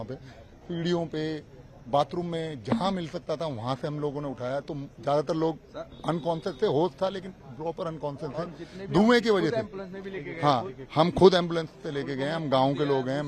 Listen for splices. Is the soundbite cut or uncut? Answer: uncut